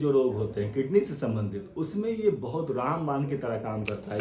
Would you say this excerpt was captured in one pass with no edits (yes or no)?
yes